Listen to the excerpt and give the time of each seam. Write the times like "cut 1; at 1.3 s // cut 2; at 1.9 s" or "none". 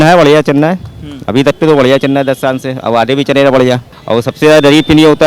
cut 1; at 3.9 s